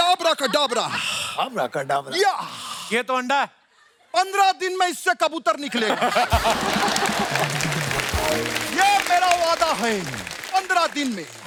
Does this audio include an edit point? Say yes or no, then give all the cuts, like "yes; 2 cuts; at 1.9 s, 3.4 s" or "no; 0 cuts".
no; 0 cuts